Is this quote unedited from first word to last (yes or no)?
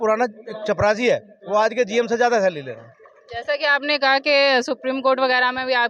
yes